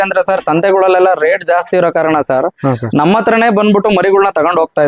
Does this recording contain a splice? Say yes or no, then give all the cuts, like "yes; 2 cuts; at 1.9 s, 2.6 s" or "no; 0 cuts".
no; 0 cuts